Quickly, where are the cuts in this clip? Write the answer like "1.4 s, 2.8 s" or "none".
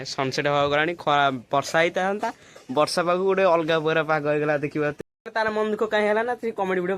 5.0 s